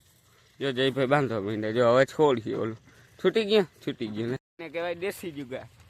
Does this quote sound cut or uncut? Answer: cut